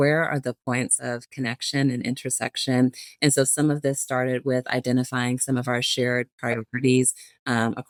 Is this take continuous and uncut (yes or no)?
yes